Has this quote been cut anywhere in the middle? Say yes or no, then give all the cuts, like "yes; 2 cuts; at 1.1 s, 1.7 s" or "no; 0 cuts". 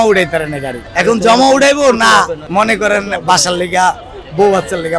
no; 0 cuts